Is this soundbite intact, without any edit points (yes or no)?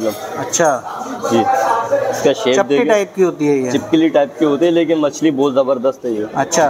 yes